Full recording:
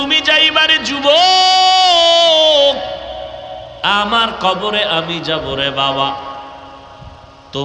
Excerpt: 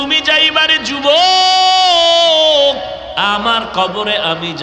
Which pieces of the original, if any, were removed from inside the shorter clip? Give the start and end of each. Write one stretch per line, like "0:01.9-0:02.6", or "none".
0:03.1-0:03.8

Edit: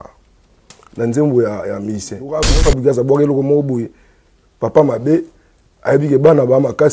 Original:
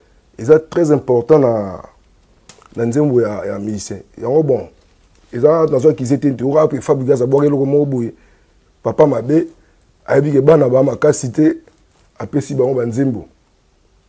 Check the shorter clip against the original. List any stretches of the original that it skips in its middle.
0:04.1-0:06.6

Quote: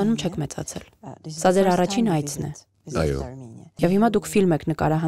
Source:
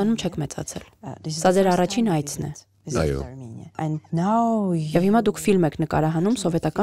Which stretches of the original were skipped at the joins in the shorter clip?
0:03.7-0:04.9

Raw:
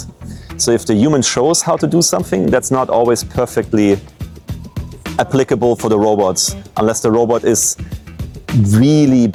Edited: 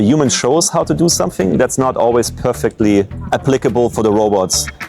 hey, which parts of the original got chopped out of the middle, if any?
0:04.1-0:05.0

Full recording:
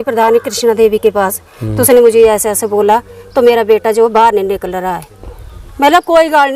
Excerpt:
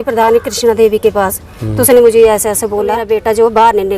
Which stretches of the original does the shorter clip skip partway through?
0:03.0-0:03.6

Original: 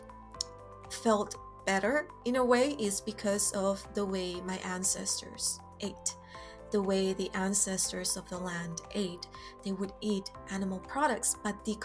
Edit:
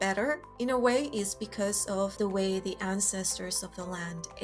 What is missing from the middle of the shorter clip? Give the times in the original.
0:03.8-0:06.7

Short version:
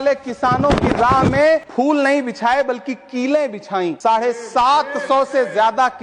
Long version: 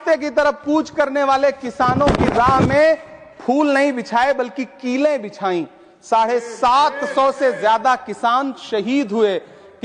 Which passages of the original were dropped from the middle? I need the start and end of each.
0:03.0-0:03.4
0:05.7-0:06.0

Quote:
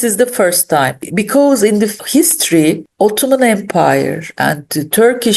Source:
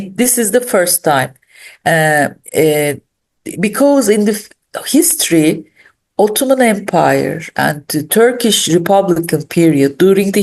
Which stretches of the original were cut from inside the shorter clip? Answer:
0:01.4-0:03.5
0:04.5-0:04.8
0:05.7-0:06.0

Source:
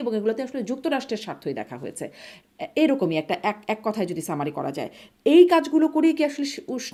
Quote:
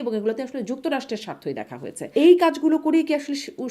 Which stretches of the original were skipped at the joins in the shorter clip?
0:02.0-0:05.1

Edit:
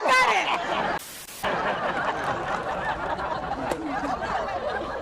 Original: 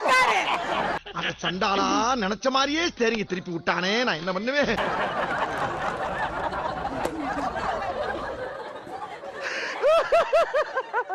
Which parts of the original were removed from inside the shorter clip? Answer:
0:01.4-0:04.8

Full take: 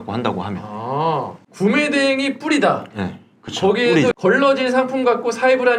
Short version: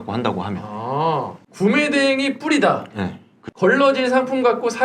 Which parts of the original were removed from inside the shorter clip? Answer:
0:03.6-0:04.2

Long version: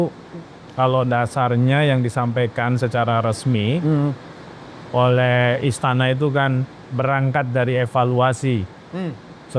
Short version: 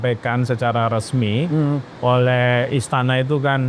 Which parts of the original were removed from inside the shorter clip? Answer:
0:04.2-0:04.8

